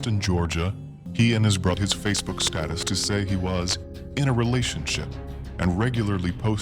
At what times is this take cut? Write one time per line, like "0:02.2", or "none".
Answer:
0:01.0
0:01.8